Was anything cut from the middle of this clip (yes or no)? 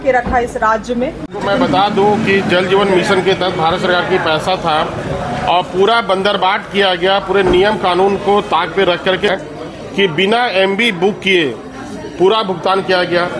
yes